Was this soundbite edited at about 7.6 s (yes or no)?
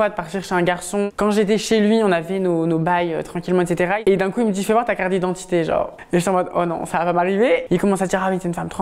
yes